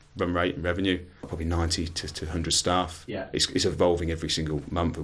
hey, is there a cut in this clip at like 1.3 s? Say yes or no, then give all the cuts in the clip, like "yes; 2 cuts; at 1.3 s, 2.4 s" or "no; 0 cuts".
yes; 1 cut; at 1.3 s